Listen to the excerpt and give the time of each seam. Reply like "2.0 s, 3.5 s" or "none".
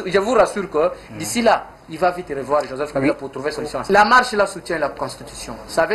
none